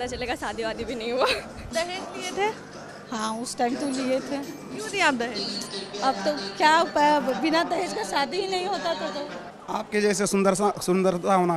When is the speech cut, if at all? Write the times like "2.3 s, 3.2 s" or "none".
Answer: 1.6 s, 9.5 s